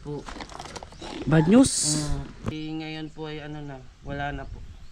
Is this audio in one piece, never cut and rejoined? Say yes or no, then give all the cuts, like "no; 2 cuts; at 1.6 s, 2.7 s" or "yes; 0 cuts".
no; 1 cut; at 2.6 s